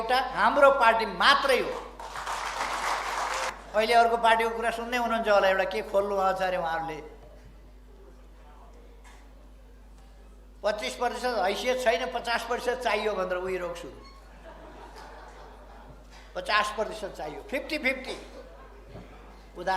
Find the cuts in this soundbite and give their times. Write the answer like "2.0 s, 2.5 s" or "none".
3.5 s